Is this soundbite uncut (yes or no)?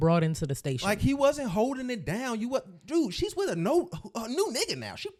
yes